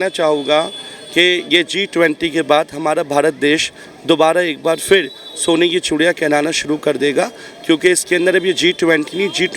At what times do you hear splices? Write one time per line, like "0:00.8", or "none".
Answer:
none